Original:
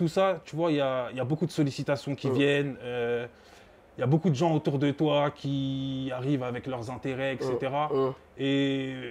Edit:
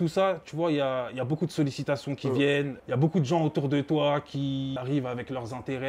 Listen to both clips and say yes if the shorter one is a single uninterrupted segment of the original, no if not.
no